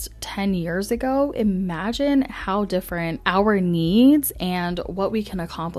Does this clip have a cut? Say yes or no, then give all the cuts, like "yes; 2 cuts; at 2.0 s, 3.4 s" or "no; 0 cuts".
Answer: yes; 1 cut; at 3.2 s